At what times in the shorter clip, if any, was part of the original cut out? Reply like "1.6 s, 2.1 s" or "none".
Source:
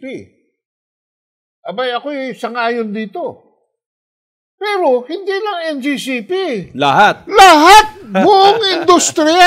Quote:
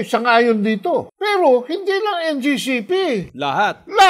1.1 s